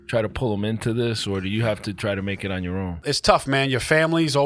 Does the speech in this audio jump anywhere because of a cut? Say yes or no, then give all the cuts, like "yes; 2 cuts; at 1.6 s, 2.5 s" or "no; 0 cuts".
yes; 1 cut; at 3.0 s